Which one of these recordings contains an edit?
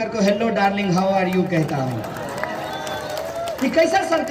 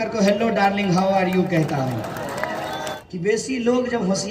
second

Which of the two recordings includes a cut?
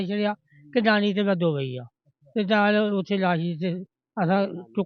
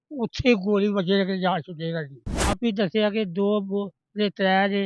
second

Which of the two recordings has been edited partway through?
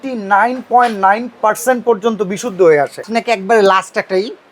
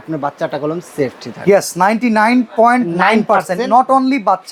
first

